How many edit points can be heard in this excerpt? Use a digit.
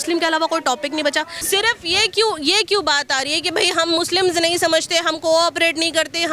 1